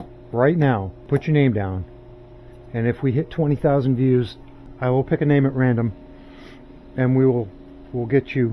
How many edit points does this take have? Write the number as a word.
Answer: two